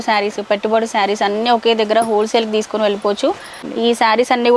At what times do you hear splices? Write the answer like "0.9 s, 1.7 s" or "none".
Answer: 3.6 s